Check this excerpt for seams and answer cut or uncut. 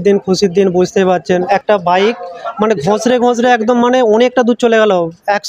cut